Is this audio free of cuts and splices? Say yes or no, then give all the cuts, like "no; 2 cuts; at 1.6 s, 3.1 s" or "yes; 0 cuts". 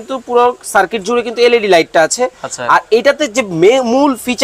yes; 0 cuts